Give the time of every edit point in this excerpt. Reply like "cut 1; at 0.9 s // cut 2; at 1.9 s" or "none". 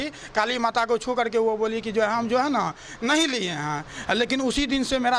none